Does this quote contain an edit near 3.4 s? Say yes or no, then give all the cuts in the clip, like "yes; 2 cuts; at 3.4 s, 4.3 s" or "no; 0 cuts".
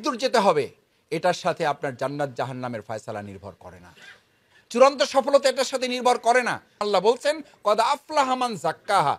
no; 1 cut; at 6.8 s